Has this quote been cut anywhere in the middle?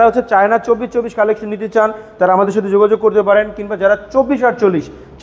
no; 0 cuts

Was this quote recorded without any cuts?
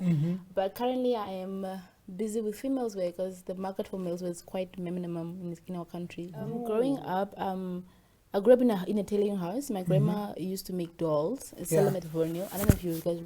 no; 1 cut; at 6.6 s

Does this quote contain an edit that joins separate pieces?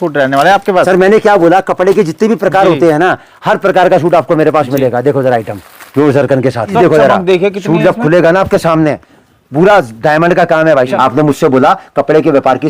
yes; 2 cuts; at 6.7 s, 10.9 s

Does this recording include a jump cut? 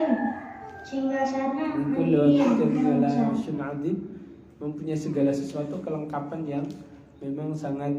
yes; 1 cut; at 3.5 s

